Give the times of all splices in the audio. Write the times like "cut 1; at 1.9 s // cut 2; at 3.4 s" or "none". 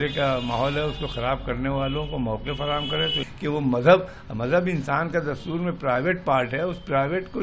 cut 1; at 3.2 s